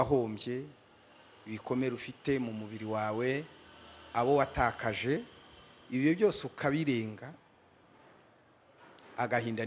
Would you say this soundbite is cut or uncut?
uncut